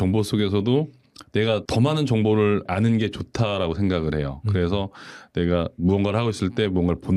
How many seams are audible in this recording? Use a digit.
0